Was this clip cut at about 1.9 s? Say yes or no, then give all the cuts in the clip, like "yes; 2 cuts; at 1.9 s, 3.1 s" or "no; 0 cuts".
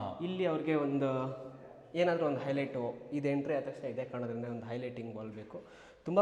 no; 0 cuts